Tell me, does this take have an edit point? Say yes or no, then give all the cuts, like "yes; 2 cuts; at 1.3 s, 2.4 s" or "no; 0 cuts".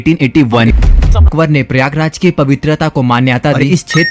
yes; 1 cut; at 1.0 s